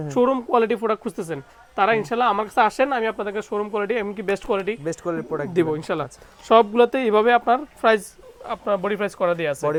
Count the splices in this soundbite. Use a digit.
0